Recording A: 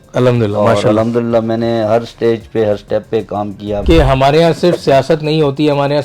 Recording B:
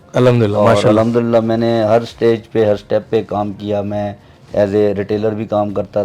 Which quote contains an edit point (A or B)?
A